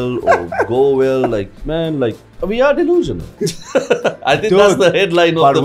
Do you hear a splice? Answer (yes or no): yes